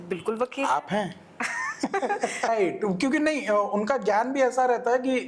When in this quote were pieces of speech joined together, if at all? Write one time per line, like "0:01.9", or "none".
0:02.5